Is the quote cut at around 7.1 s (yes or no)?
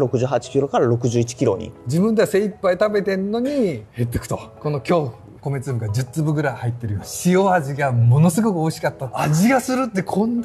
yes